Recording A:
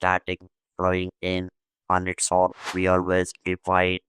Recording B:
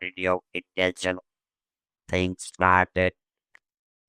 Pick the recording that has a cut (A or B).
A